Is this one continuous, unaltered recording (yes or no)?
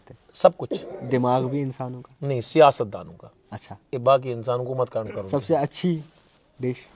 yes